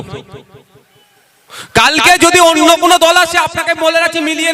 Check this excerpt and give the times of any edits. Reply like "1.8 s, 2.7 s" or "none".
none